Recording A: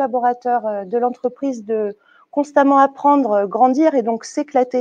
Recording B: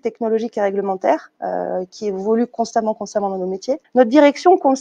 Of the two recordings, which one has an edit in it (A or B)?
B